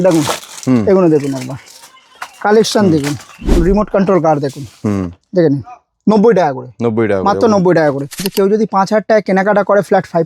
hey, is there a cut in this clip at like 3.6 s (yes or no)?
yes